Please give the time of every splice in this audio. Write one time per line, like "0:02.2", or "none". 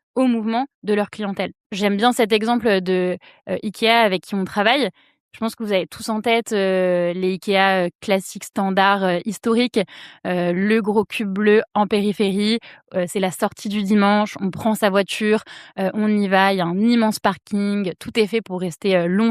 0:01.6